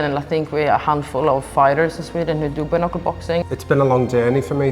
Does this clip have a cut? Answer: yes; 1 cut; at 3.5 s

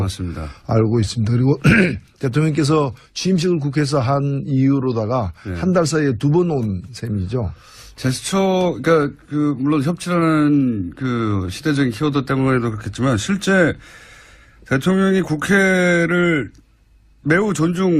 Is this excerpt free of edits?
yes; 0 cuts

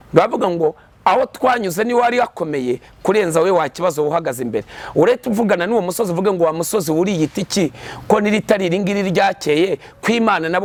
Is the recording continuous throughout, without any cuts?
yes; 0 cuts

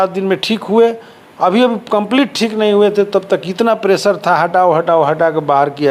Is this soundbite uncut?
yes; 0 cuts

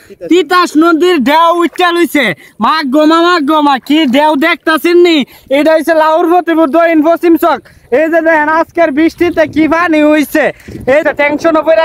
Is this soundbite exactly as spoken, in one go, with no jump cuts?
yes; 0 cuts

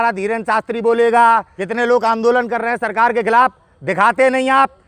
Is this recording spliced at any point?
yes; 1 cut; at 1.5 s

